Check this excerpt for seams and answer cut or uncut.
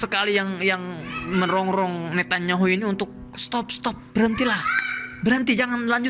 uncut